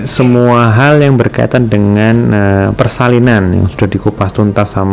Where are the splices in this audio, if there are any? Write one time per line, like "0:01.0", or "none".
none